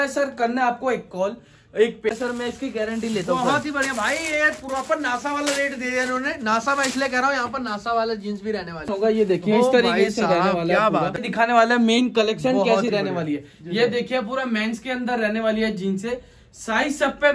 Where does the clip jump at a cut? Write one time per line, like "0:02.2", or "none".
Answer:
0:02.1
0:08.9
0:11.1